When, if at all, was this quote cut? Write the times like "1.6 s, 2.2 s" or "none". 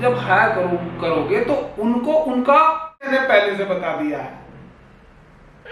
3.1 s